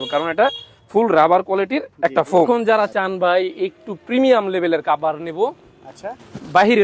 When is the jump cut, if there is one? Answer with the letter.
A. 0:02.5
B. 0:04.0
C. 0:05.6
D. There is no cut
A